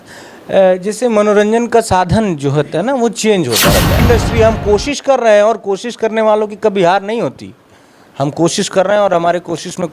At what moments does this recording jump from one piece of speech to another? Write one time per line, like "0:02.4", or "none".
0:04.0